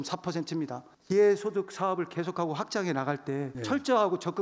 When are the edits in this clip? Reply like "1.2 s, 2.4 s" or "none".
0.9 s